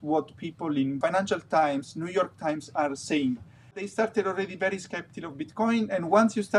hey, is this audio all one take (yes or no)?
no